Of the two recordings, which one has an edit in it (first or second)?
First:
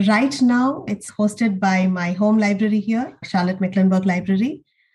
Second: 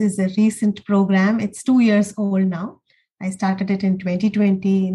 first